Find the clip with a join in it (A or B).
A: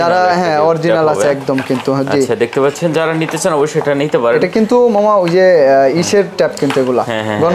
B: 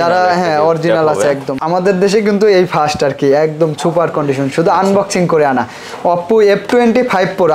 B